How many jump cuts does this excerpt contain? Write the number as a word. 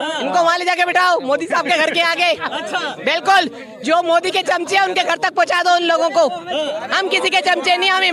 zero